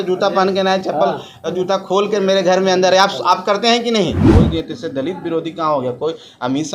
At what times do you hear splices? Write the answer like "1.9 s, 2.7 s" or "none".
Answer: 4.2 s